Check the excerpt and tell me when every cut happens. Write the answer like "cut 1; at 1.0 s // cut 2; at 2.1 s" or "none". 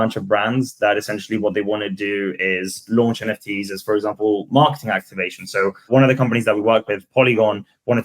cut 1; at 5.9 s